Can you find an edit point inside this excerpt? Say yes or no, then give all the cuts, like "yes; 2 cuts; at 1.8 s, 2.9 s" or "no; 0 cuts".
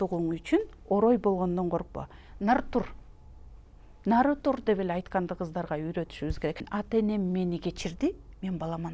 yes; 1 cut; at 6.6 s